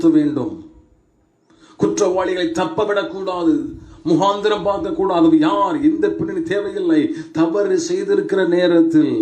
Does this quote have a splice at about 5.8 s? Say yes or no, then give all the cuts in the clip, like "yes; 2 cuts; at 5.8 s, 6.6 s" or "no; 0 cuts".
no; 0 cuts